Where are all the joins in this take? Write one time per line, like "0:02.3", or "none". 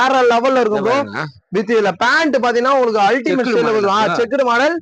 none